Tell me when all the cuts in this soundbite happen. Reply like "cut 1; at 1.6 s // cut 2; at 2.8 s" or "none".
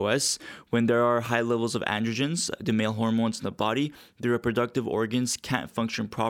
none